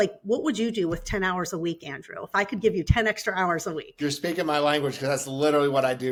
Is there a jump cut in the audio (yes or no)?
no